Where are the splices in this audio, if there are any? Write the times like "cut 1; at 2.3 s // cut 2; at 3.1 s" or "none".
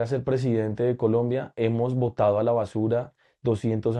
none